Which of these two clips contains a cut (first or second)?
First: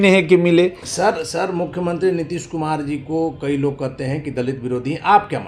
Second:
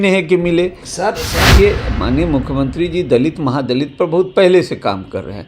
second